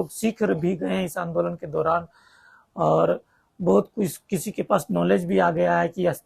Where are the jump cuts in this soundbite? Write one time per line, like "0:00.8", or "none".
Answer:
none